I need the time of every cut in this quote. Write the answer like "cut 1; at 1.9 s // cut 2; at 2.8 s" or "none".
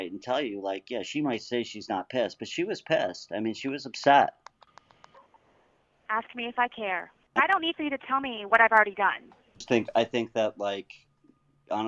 cut 1; at 7.2 s // cut 2; at 9.6 s